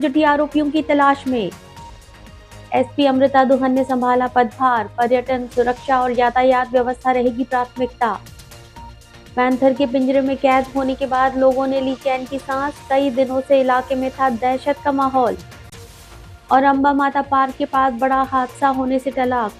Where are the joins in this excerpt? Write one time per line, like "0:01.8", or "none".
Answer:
none